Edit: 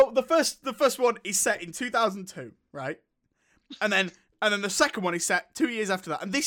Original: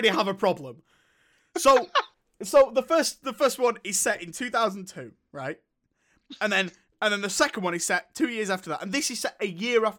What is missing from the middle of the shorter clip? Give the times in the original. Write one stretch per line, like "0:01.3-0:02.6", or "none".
none